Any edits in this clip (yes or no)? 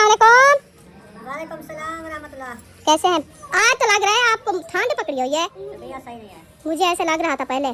yes